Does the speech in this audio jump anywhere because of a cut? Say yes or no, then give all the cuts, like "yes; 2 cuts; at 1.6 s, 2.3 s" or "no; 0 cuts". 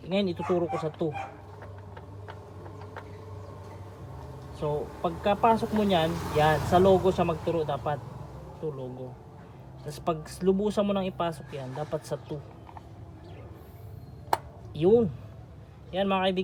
no; 0 cuts